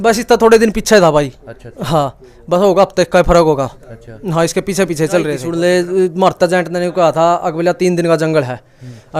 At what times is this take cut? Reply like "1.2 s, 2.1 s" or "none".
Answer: 5.4 s